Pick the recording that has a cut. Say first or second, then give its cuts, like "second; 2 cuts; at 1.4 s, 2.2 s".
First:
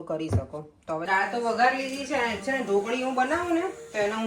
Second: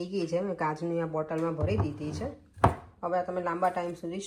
first; 1 cut; at 1.1 s